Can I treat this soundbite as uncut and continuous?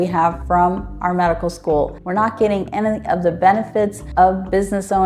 no; 1 cut; at 2.0 s

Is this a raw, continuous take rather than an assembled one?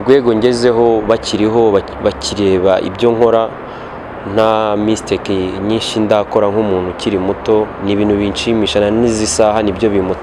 yes; 0 cuts

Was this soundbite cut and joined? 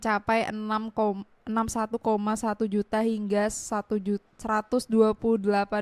no; 0 cuts

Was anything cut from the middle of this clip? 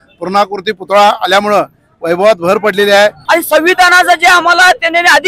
yes; 1 cut; at 3.2 s

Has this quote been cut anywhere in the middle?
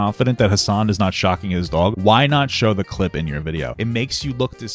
yes; 2 cuts; at 2.0 s, 3.7 s

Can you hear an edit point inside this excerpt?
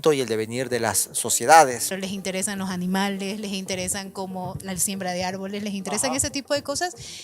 yes; 1 cut; at 1.9 s

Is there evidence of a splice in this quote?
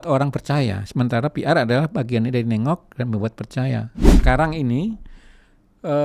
yes; 1 cut; at 4.2 s

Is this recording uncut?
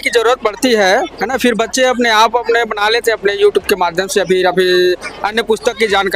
yes; 0 cuts

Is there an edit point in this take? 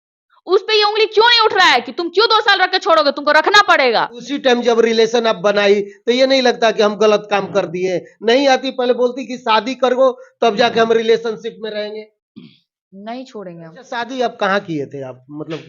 yes; 2 cuts; at 4.2 s, 13.9 s

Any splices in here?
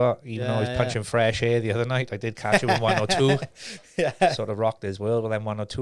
no; 0 cuts

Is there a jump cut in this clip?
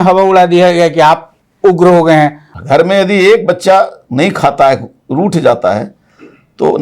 yes; 1 cut; at 2.5 s

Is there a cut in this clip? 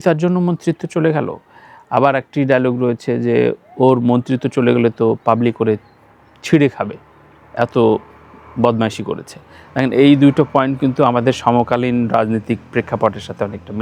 no; 0 cuts

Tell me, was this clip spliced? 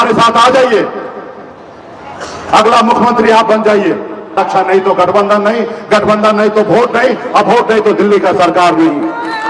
yes; 1 cut; at 4.4 s

